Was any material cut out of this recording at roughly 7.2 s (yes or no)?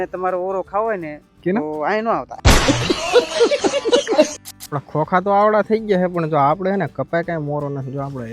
no